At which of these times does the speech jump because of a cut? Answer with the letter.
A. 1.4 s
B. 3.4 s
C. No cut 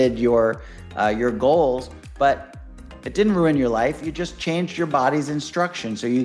C